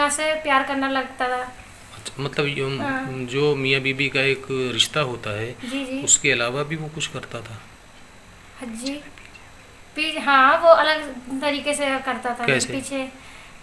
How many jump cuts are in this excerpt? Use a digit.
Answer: 0